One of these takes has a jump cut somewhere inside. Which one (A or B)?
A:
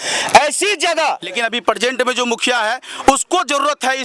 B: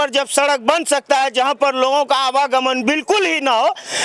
A